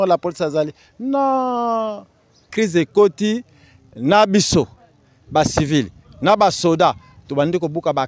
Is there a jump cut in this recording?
yes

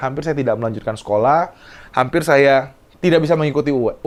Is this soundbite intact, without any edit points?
yes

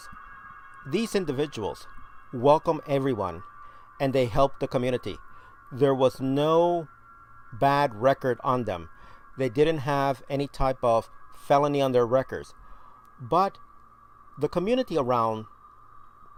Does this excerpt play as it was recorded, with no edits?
yes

